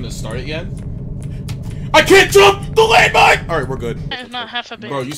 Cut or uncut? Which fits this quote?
cut